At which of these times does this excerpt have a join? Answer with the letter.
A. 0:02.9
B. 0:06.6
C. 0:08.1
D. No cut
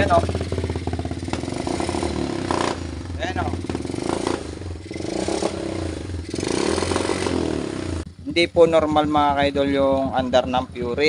C